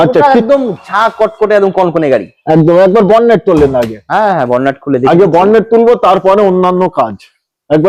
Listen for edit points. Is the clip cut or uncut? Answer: uncut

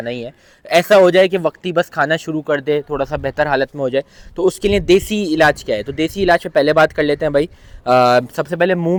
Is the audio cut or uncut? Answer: uncut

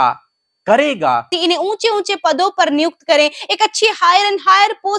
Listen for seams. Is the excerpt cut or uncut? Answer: cut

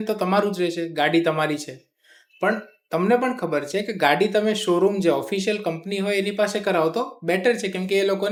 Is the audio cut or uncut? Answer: uncut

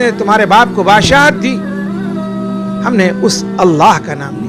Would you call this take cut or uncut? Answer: cut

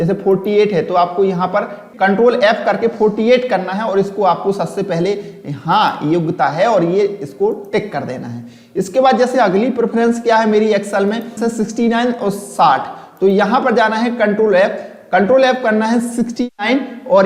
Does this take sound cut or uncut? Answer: cut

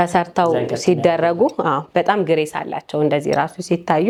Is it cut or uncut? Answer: uncut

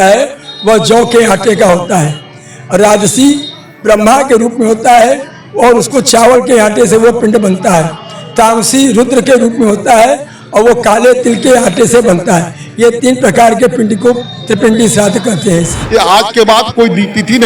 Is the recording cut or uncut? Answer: cut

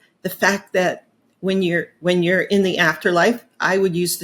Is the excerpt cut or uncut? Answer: uncut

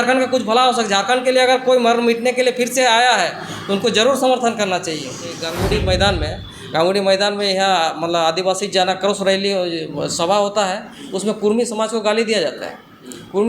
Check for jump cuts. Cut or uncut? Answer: cut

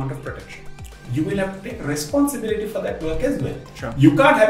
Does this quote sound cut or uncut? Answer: cut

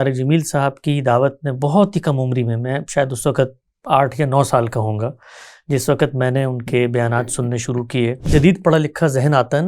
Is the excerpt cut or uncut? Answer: cut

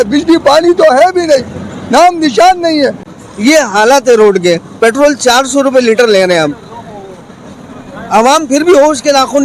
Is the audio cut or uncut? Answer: cut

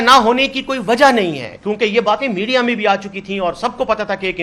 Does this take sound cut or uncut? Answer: uncut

